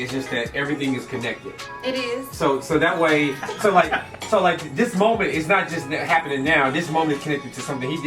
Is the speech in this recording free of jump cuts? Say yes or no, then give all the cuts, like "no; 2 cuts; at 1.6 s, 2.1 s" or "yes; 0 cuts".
no; 1 cut; at 4.0 s